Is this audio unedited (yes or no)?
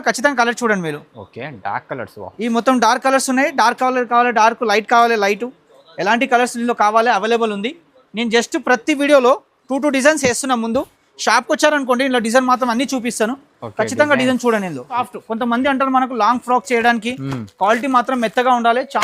no